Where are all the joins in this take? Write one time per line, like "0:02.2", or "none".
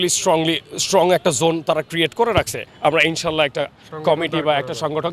0:02.6